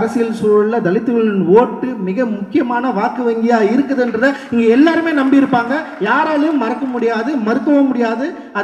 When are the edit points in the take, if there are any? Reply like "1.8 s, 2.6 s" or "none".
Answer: none